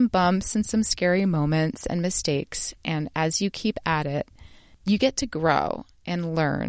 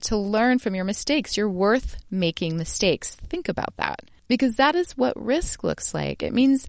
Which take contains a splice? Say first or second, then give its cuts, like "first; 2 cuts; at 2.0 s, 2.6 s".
second; 1 cut; at 4.1 s